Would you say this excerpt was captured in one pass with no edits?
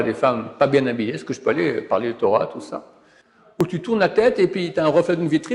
no; 1 cut; at 3.6 s

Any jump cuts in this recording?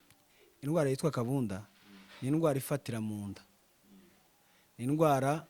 no; 0 cuts

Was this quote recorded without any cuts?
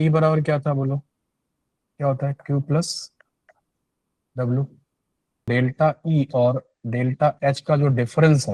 no; 1 cut; at 5.5 s

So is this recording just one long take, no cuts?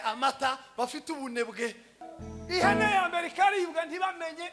no; 1 cut; at 1.9 s

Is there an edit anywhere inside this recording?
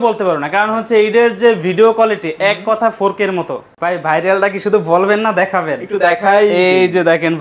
yes; 1 cut; at 3.7 s

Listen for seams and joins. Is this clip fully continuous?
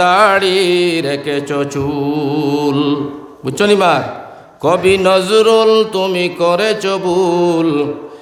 yes; 0 cuts

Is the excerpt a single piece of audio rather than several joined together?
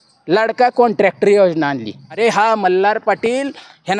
no; 1 cut; at 2.1 s

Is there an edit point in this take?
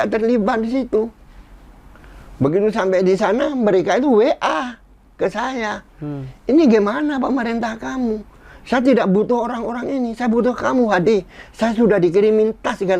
no; 0 cuts

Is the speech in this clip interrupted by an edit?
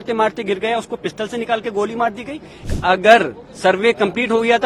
yes; 1 cut; at 2.7 s

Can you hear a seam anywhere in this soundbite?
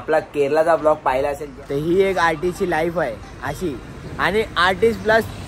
yes; 1 cut; at 1.5 s

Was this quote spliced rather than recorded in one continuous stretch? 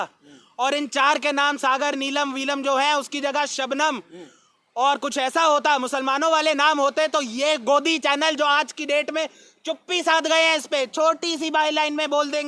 no; 0 cuts

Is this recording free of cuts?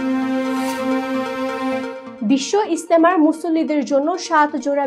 yes; 0 cuts

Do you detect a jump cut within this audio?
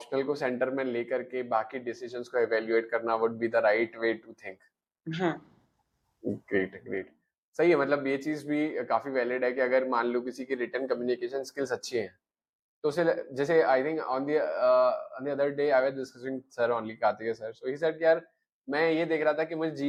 no; 0 cuts

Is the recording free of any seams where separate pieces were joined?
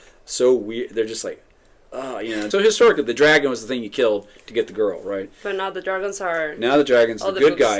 no; 1 cut; at 2.5 s

